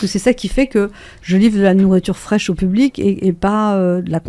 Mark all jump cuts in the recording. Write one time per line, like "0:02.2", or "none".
none